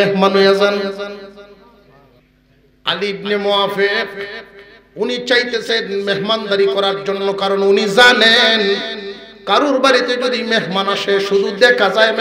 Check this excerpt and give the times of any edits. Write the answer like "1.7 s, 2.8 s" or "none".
2.2 s